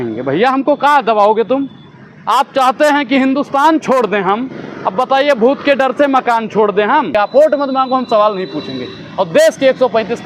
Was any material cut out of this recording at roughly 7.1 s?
yes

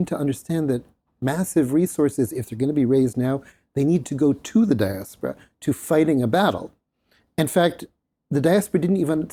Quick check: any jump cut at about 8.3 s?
no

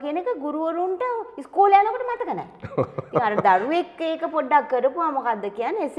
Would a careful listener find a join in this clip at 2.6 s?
no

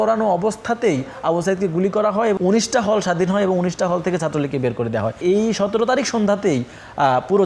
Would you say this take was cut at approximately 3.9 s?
no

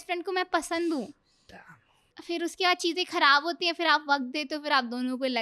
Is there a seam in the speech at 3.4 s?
no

